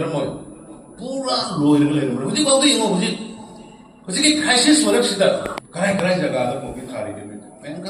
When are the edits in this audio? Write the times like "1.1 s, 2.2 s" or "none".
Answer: 5.6 s